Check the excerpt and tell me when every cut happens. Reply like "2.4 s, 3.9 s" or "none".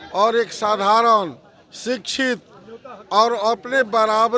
none